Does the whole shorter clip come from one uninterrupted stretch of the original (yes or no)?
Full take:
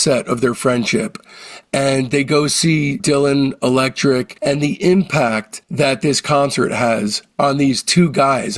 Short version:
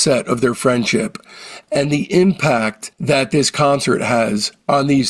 no